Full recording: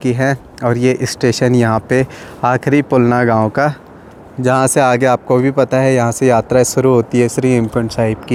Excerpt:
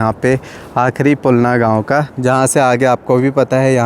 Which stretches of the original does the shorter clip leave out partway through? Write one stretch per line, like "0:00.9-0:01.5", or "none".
0:03.8-0:04.3